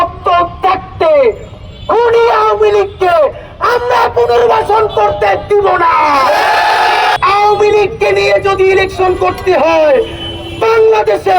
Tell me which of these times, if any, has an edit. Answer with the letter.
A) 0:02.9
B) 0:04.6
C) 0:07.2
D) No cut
C